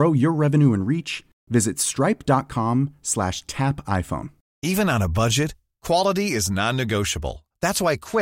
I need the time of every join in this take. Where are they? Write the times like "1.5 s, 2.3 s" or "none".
4.4 s